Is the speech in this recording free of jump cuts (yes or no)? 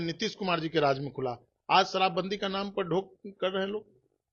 yes